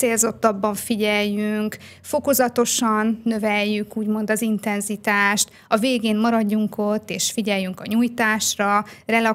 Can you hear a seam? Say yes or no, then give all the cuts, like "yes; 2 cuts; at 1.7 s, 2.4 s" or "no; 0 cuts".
no; 0 cuts